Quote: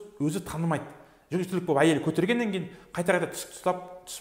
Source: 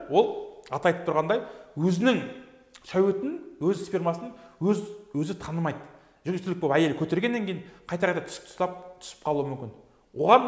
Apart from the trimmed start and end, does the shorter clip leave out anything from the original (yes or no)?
no